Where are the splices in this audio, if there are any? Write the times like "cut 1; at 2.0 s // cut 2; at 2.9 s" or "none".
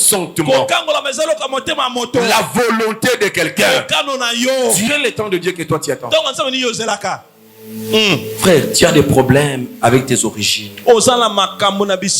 cut 1; at 4.9 s